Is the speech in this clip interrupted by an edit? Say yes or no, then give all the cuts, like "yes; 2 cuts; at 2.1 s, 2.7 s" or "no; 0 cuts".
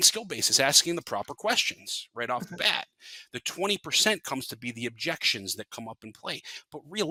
no; 0 cuts